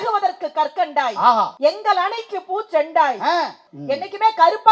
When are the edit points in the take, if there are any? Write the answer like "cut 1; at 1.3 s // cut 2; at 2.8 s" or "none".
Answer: cut 1; at 1.5 s // cut 2; at 3.6 s